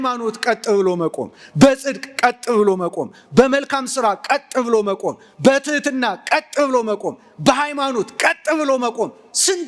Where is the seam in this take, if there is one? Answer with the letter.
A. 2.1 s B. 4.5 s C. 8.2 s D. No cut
D